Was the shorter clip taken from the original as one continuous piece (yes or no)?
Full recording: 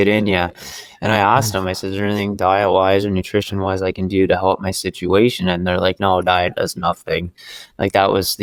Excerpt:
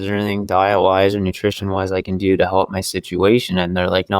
yes